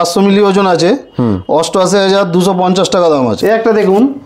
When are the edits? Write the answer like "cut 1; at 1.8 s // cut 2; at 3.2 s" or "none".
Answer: cut 1; at 3.4 s

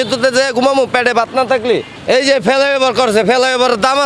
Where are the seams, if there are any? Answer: cut 1; at 1.9 s

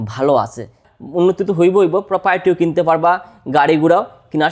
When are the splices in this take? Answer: cut 1; at 0.9 s

